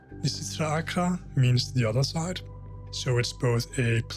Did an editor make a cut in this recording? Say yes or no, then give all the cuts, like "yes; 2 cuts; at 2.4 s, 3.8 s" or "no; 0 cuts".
no; 0 cuts